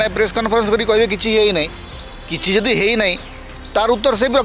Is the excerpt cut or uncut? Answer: uncut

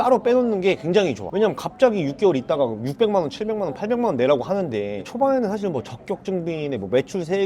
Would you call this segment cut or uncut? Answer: cut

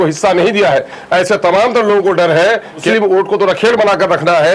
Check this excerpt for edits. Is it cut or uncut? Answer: cut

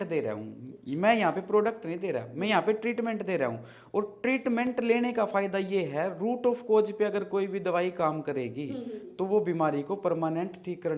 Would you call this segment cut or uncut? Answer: uncut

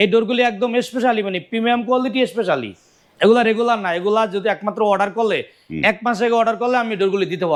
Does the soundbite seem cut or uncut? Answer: uncut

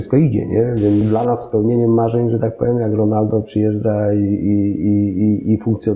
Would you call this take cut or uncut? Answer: cut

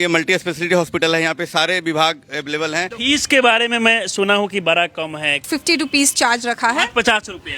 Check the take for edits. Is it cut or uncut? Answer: cut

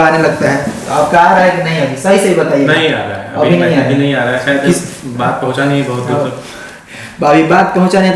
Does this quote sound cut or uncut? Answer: uncut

